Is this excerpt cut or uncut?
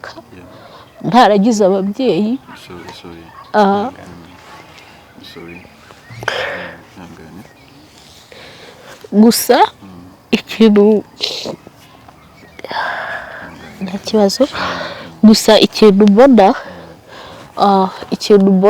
uncut